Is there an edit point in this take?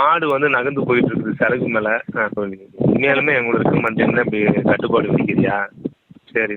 yes; 2 cuts; at 2.4 s, 5.9 s

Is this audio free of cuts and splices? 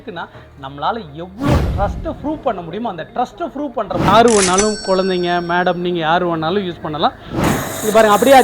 no; 2 cuts; at 4.1 s, 7.3 s

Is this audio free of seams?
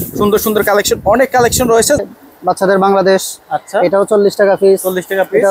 no; 1 cut; at 2.0 s

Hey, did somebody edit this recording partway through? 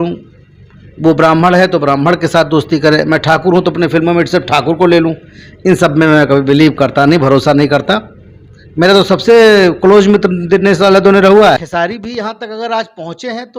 yes; 1 cut; at 11.5 s

